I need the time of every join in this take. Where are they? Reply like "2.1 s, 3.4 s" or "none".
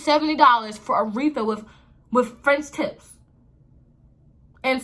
none